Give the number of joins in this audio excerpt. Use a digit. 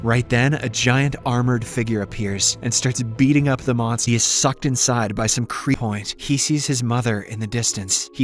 2